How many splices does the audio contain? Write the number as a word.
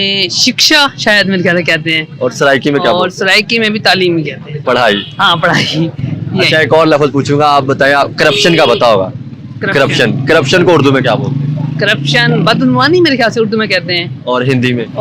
zero